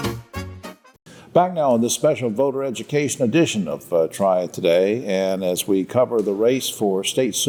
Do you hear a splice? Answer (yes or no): no